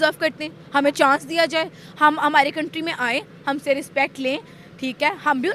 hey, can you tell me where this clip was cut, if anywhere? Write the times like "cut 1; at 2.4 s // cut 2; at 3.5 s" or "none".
none